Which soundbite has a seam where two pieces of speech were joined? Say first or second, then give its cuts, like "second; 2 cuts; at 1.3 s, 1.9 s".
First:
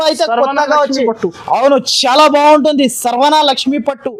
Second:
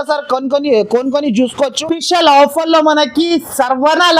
second; 1 cut; at 1.8 s